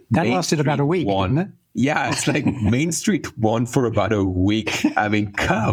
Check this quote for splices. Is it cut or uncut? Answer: uncut